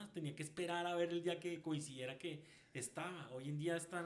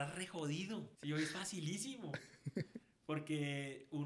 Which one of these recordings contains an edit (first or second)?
second